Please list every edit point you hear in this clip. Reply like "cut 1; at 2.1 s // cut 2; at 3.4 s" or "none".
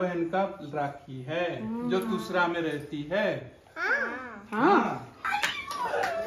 cut 1; at 5.1 s

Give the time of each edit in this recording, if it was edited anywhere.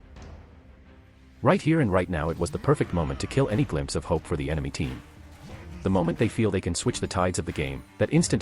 cut 1; at 1.4 s

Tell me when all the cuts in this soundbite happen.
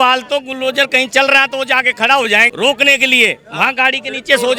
cut 1; at 2.5 s

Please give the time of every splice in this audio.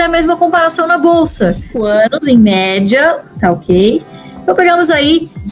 cut 1; at 1.7 s

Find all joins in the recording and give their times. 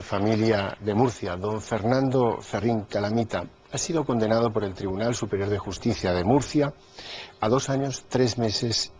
cut 1; at 3.1 s

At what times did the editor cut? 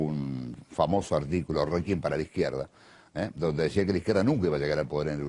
cut 1; at 3.4 s

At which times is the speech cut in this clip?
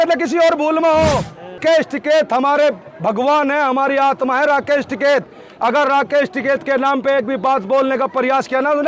cut 1; at 1.6 s

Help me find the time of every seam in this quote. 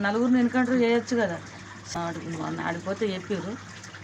cut 1; at 1.8 s

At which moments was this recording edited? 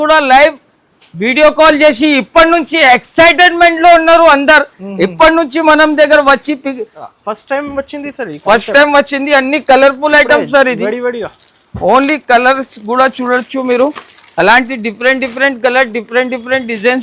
cut 1; at 7.0 s

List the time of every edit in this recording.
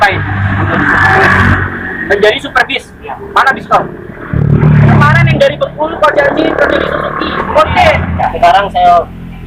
cut 1; at 4.4 s // cut 2; at 8.2 s

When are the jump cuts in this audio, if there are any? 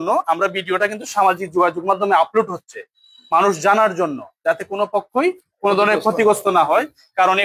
none

